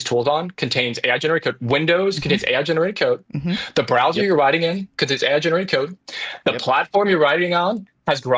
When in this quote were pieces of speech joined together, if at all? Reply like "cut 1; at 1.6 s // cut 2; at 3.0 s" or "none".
none